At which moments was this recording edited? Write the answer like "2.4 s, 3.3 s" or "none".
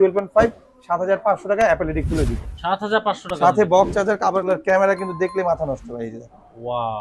4.4 s